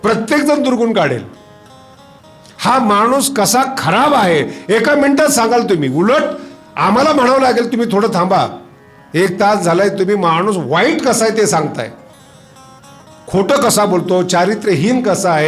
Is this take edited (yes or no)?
no